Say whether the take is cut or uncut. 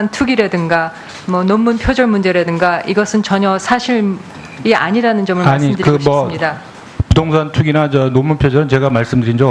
cut